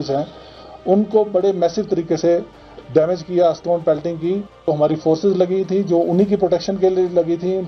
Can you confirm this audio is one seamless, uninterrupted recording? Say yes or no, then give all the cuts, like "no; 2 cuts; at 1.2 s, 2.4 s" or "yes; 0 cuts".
no; 1 cut; at 4.7 s